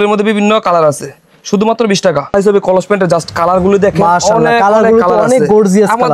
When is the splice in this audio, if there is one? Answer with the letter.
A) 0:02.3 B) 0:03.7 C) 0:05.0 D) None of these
A